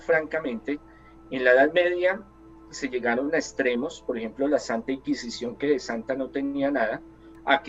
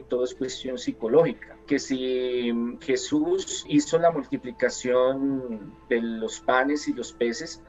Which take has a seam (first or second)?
second